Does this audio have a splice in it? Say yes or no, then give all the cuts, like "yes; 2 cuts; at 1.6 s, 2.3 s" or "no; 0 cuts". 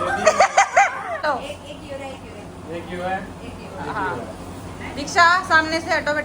yes; 1 cut; at 1.2 s